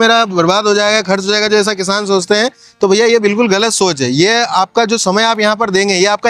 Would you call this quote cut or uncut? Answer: uncut